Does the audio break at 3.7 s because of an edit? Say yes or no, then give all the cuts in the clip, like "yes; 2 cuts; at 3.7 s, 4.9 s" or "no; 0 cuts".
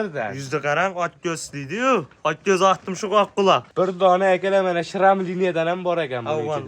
yes; 1 cut; at 3.7 s